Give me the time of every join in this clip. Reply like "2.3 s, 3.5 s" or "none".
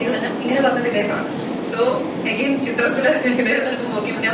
none